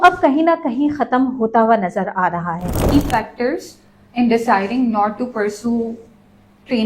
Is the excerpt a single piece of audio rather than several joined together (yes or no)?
no